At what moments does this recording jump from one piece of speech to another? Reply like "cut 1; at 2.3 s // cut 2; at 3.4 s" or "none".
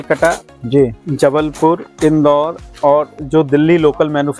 none